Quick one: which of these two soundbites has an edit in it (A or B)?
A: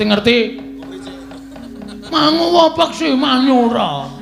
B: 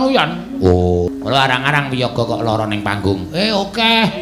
B